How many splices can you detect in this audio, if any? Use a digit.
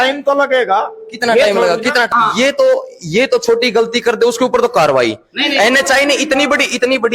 1